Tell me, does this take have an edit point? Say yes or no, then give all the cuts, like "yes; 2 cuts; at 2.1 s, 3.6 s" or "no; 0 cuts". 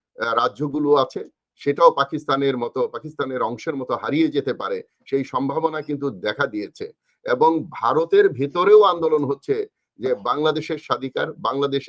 no; 0 cuts